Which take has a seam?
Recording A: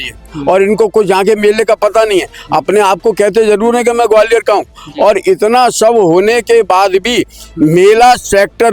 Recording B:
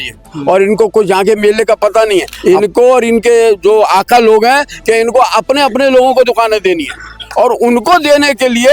B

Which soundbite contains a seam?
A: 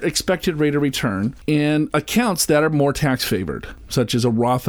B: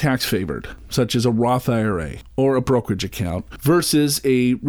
A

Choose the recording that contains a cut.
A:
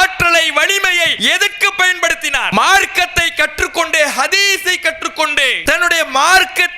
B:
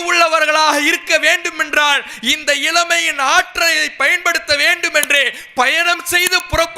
A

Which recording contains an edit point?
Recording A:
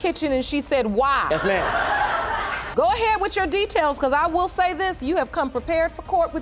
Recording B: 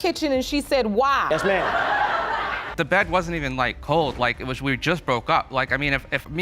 B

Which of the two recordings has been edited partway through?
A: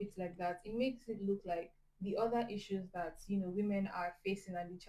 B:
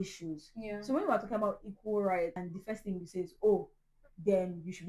B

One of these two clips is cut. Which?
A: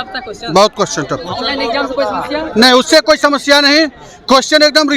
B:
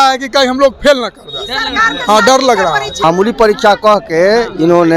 B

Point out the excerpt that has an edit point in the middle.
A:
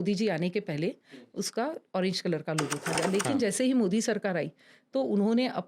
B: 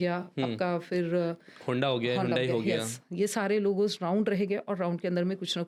A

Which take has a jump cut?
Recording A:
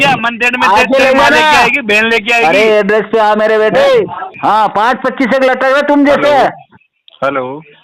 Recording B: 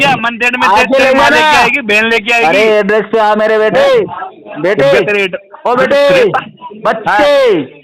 A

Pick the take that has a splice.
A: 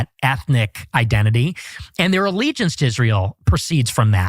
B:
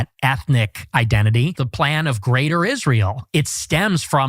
B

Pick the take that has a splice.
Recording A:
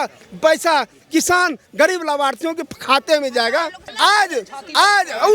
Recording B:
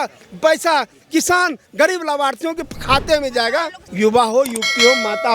A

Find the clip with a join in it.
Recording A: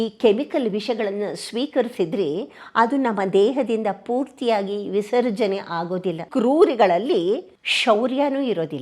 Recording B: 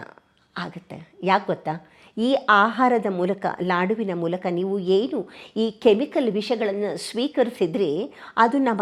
A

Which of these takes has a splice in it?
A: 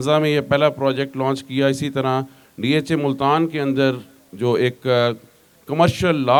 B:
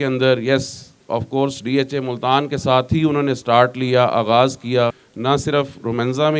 B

